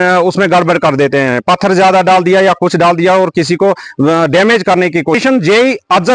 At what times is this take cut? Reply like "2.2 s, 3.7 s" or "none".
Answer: 5.2 s

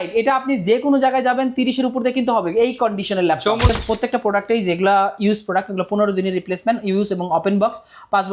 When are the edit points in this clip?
3.7 s

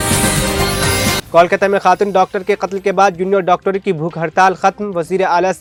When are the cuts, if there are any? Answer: none

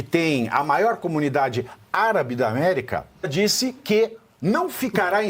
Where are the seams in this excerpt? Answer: 3.3 s

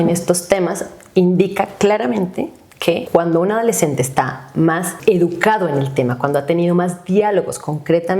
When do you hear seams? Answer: 3.0 s, 4.9 s

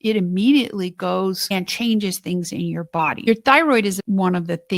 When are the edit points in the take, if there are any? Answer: 1.4 s, 3.3 s

